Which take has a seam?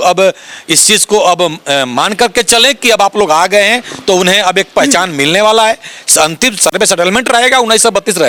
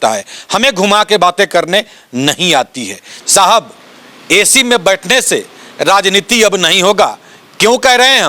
second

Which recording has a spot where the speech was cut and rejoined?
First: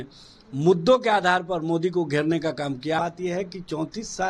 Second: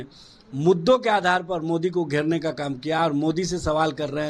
first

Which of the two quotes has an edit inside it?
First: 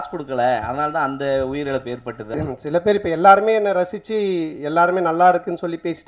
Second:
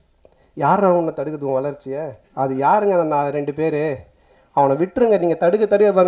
first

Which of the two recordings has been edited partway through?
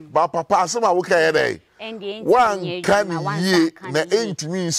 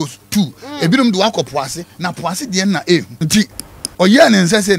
second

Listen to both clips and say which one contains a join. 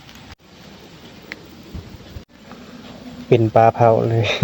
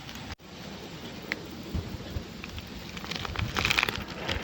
first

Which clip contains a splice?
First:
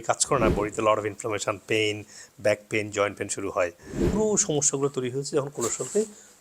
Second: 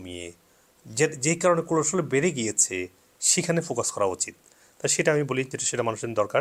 first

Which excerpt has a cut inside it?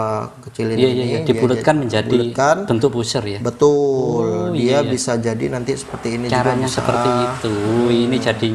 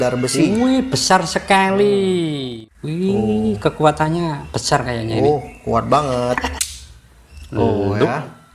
second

